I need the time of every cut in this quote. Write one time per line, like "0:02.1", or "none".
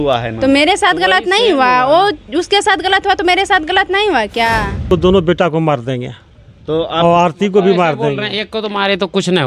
0:04.8